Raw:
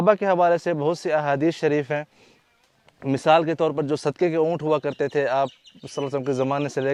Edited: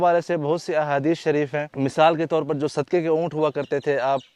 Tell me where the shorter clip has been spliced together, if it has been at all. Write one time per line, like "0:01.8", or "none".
0:01.7